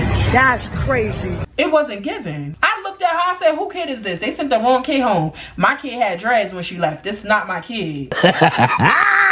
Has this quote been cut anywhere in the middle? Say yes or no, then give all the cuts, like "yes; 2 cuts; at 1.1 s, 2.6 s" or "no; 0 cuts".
no; 0 cuts